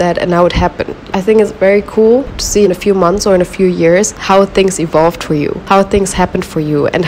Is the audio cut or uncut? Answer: cut